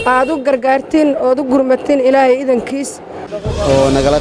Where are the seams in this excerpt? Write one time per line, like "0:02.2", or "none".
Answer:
0:03.2